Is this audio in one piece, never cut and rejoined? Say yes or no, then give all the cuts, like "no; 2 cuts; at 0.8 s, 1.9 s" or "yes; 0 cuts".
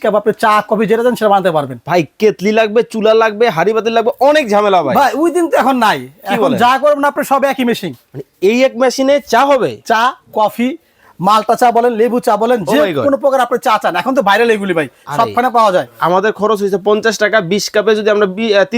no; 1 cut; at 15.9 s